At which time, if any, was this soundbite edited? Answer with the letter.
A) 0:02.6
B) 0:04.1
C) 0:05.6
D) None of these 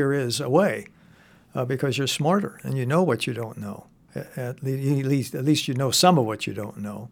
B